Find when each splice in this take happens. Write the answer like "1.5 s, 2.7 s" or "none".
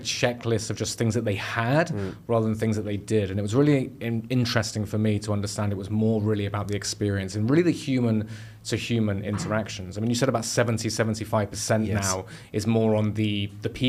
none